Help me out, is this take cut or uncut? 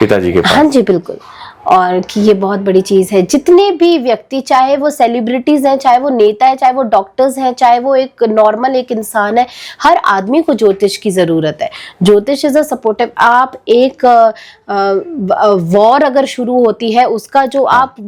uncut